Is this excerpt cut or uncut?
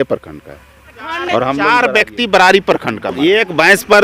cut